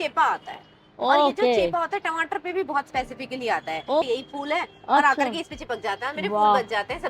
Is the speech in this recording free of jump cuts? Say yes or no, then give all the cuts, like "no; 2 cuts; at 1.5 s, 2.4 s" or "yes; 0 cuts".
no; 1 cut; at 4.0 s